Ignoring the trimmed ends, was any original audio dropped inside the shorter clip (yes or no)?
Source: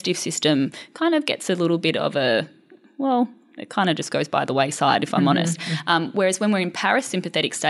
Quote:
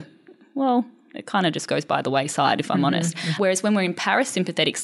yes